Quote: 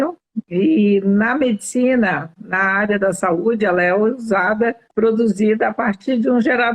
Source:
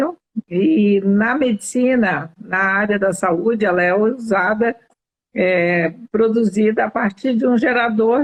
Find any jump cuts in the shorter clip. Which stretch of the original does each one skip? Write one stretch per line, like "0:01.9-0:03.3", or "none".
0:04.9-0:06.0